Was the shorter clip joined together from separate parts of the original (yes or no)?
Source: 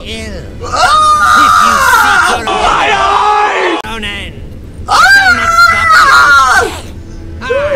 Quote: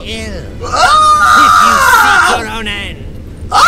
yes